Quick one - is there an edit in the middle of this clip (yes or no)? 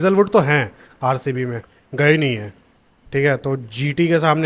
no